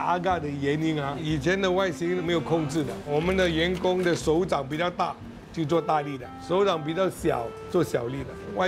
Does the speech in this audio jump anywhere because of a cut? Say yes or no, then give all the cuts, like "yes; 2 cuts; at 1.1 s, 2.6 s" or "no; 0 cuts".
no; 0 cuts